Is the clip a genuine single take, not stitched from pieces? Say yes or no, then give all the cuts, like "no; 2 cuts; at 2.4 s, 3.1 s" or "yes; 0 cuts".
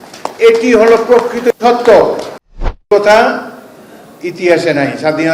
no; 1 cut; at 2.9 s